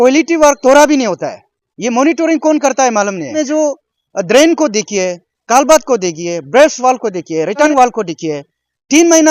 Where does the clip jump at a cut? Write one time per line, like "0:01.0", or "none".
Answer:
0:03.4
0:07.7